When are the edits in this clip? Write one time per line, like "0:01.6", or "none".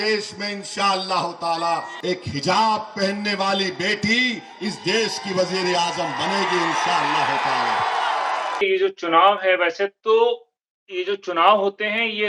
0:01.9
0:08.6